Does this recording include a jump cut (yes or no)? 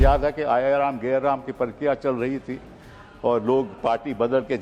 no